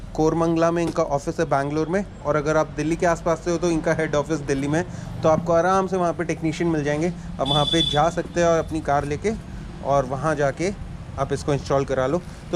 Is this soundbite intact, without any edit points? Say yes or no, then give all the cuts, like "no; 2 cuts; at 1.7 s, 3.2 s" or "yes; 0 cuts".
yes; 0 cuts